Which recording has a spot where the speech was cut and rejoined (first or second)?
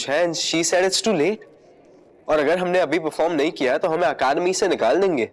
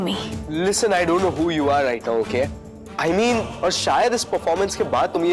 second